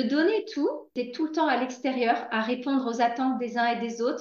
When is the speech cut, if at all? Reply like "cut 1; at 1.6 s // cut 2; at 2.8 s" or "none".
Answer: cut 1; at 1.0 s